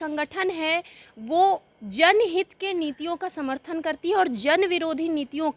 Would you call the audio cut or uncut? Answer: uncut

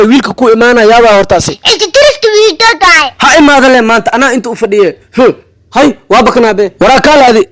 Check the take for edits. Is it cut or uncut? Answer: uncut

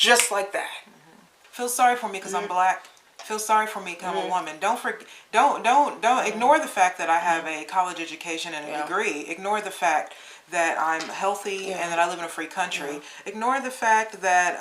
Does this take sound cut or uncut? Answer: cut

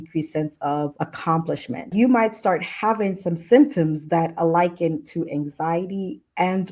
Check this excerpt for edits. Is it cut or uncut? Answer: cut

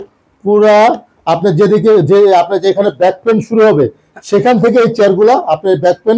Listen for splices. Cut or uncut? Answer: uncut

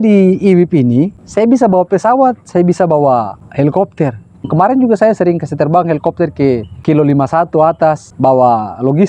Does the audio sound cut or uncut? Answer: cut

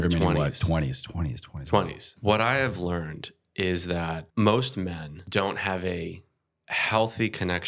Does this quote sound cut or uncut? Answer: cut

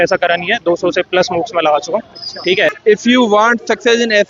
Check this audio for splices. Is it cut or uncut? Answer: cut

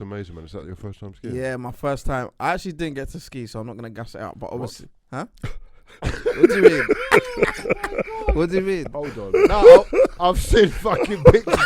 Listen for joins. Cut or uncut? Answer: uncut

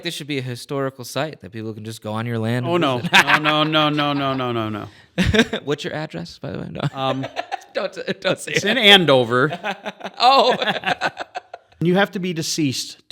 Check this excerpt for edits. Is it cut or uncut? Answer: cut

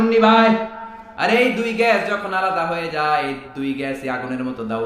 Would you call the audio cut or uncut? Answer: uncut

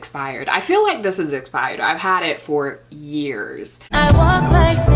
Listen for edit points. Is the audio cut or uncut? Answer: cut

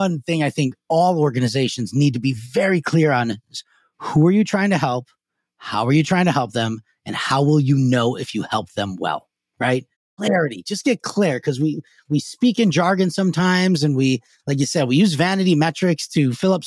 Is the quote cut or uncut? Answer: cut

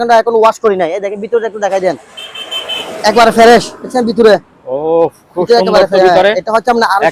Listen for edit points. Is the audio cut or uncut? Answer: uncut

